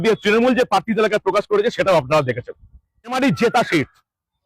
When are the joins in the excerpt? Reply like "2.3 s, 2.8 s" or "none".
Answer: 3.1 s